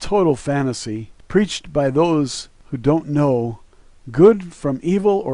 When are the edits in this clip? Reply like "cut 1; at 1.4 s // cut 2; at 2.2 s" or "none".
none